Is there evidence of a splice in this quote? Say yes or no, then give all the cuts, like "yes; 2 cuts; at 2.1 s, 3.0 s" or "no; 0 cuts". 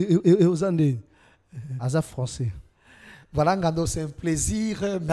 no; 0 cuts